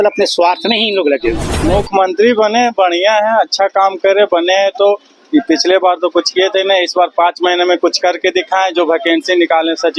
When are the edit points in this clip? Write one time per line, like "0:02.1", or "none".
0:01.5